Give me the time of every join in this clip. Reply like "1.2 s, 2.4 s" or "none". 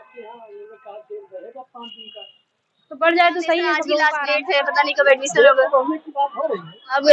4.1 s

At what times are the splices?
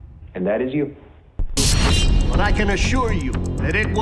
1.6 s

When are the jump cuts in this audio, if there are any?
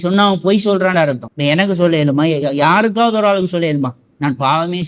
1.3 s

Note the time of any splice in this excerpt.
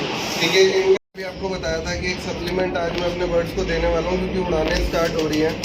1.0 s

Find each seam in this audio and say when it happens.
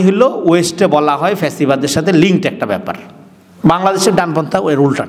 none

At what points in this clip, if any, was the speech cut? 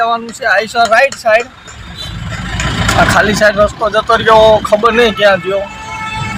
none

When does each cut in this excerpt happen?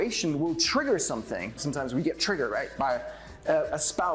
1.6 s

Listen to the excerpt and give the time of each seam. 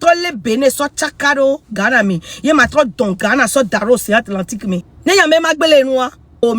4.9 s

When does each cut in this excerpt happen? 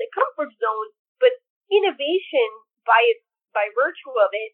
1.5 s

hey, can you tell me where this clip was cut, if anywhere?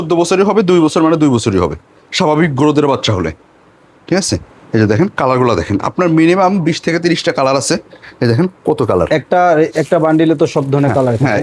none

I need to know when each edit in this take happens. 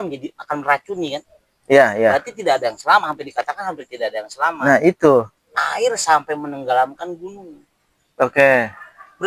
5.4 s

